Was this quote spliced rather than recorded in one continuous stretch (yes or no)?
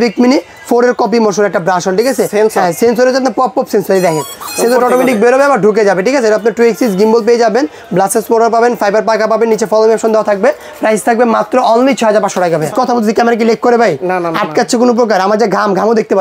yes